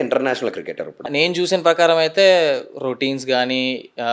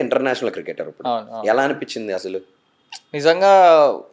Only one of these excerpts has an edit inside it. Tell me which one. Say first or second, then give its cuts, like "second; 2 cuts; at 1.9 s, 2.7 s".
first; 1 cut; at 1.1 s